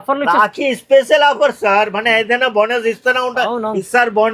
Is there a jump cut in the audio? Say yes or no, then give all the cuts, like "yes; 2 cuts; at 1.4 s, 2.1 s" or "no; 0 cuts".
no; 0 cuts